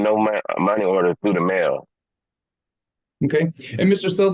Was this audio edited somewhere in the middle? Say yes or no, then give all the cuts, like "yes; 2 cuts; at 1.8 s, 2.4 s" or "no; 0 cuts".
no; 0 cuts